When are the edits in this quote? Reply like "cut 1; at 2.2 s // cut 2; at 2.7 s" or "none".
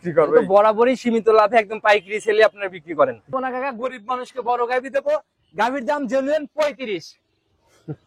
cut 1; at 3.3 s